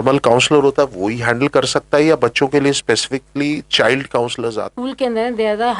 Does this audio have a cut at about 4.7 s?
yes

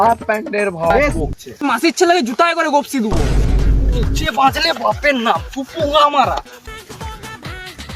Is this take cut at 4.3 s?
no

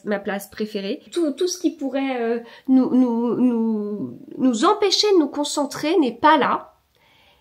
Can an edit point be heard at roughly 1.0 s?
yes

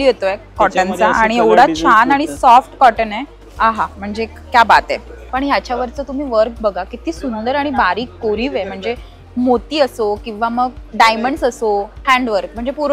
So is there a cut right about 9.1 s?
no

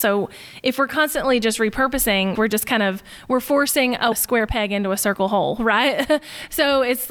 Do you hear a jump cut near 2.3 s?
yes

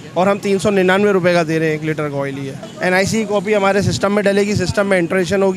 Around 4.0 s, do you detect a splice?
no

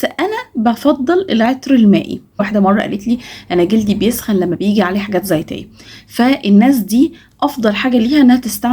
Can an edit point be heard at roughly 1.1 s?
no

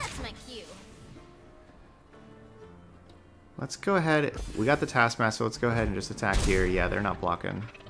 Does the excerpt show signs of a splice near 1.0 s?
no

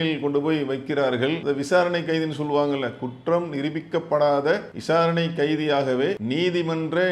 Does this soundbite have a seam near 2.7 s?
no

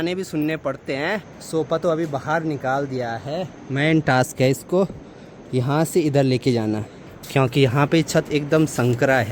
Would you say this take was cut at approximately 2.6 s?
no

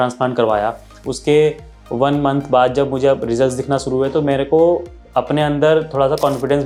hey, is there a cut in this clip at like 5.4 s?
no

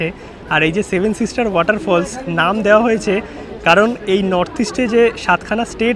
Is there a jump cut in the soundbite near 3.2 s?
no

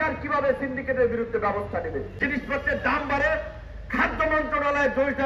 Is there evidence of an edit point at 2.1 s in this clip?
yes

